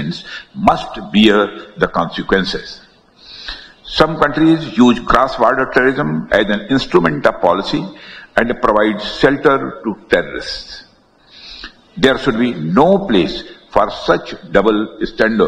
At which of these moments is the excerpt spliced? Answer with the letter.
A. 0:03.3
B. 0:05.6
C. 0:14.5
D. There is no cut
D